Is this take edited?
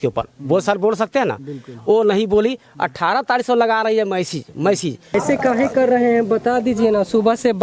yes; 1 cut; at 5.1 s

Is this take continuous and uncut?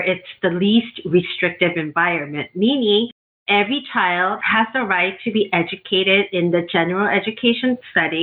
yes; 0 cuts

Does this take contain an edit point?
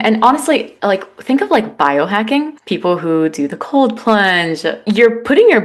yes; 1 cut; at 4.7 s

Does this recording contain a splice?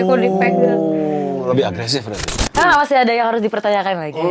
yes; 1 cut; at 2.6 s

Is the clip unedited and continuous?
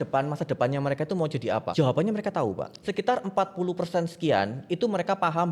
no; 2 cuts; at 1.7 s, 2.7 s

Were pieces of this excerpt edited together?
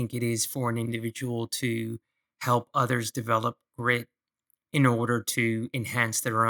no; 0 cuts

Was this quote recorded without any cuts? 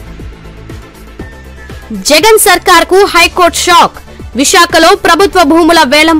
no; 1 cut; at 0.9 s

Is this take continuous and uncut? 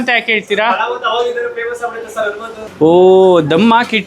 no; 1 cut; at 2.5 s

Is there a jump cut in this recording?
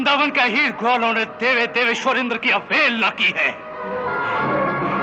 no; 0 cuts

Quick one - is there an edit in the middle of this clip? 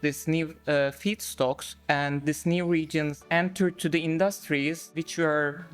yes; 2 cuts; at 3.2 s, 4.9 s

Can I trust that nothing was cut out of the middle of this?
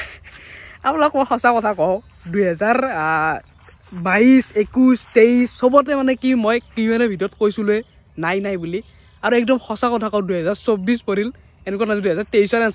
yes; 0 cuts

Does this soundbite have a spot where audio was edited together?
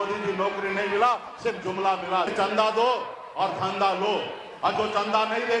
yes; 1 cut; at 2.3 s

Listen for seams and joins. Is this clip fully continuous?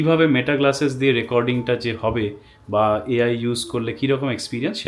yes; 0 cuts

